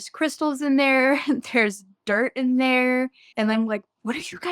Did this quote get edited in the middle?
no; 0 cuts

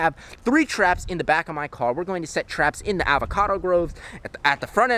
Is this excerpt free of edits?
yes; 0 cuts

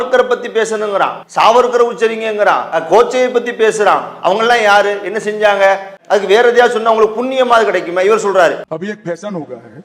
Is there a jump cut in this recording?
yes; 3 cuts; at 1.2 s, 5.9 s, 8.6 s

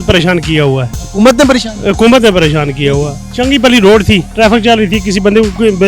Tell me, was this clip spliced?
yes; 1 cut; at 4.3 s

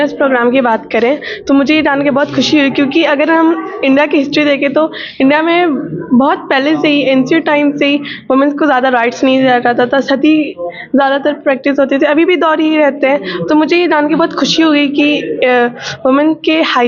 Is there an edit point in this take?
no; 0 cuts

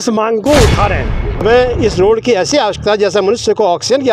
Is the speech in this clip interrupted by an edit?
yes; 1 cut; at 1.3 s

